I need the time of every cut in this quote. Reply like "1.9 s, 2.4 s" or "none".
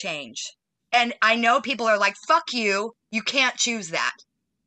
none